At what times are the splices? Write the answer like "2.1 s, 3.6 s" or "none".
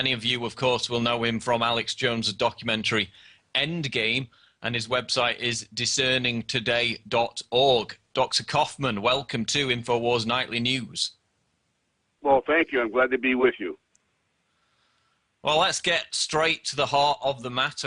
2.6 s

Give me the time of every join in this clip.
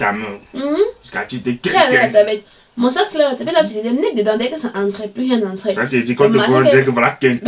none

